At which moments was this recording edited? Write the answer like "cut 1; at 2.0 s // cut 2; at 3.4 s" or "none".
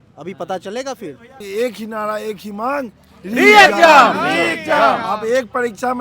cut 1; at 1.4 s